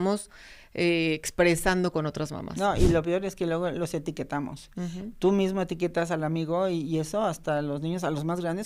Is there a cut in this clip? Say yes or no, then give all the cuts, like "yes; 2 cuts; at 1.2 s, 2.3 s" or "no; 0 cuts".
no; 0 cuts